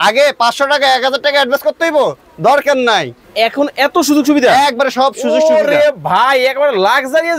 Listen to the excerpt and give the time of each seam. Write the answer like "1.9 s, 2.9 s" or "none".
3.2 s

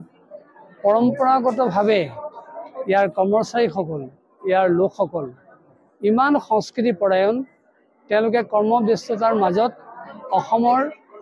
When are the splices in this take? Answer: none

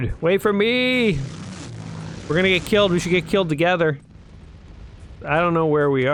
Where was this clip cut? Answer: none

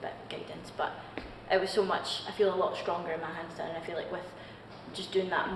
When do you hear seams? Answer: none

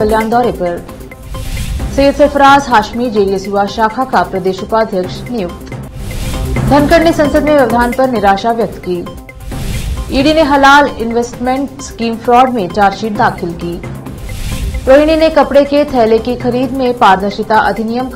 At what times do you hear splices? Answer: none

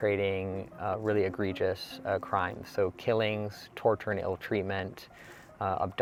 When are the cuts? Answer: none

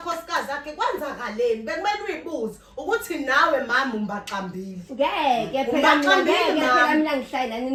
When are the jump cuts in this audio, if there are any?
none

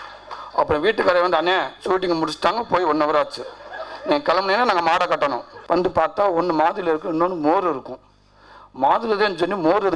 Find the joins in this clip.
5.5 s

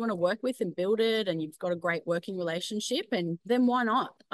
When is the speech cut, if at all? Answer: 3.4 s

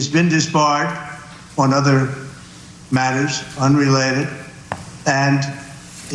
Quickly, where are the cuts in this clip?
none

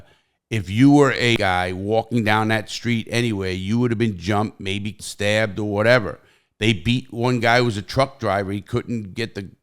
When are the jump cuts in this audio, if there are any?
1.4 s, 5.0 s

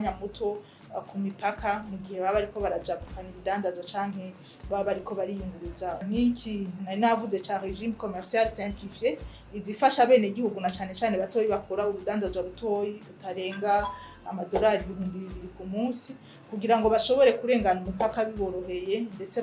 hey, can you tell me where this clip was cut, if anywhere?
6.0 s

